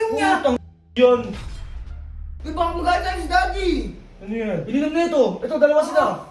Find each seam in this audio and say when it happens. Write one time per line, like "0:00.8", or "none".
0:01.9